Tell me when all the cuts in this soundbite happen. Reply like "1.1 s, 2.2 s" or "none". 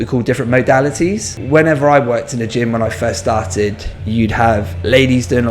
1.3 s